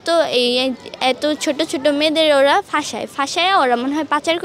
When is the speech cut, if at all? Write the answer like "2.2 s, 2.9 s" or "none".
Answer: none

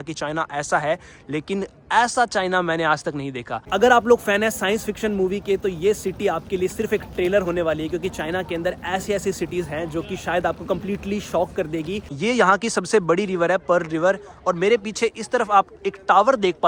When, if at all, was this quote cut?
none

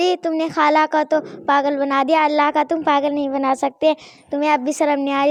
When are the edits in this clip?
none

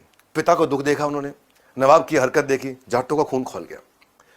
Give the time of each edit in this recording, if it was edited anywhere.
2.9 s

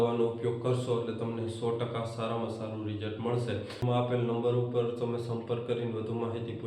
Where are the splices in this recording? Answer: 3.8 s

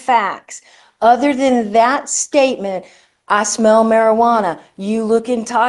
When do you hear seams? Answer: none

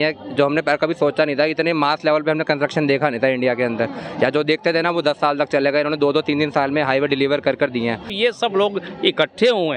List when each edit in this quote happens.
8.1 s

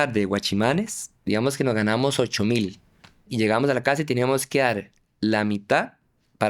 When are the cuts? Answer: 3.3 s

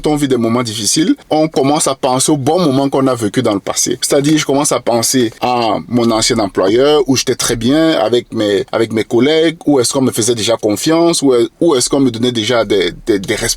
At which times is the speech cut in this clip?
1.2 s, 3.9 s, 5.4 s, 8.7 s

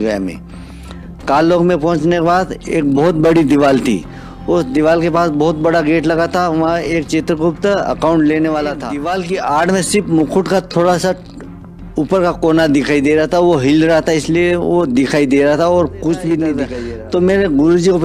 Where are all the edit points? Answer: 8.9 s, 16.7 s

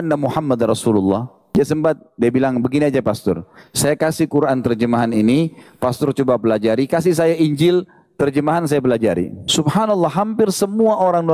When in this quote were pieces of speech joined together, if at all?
1.4 s, 9.4 s

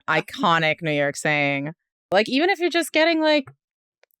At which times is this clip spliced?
2.1 s

